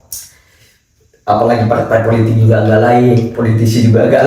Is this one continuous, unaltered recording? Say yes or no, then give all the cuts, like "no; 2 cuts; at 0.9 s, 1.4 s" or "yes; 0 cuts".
yes; 0 cuts